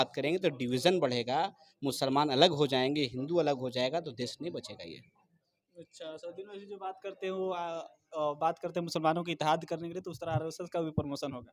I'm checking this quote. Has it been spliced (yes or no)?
no